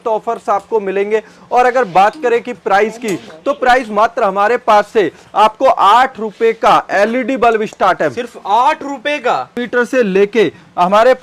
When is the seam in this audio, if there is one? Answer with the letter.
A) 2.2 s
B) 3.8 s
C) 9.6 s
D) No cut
C